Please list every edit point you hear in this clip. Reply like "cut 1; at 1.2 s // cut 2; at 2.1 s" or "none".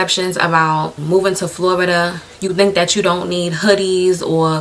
cut 1; at 0.9 s